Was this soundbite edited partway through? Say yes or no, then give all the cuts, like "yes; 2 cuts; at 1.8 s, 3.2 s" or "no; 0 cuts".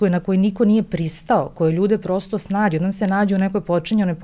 no; 0 cuts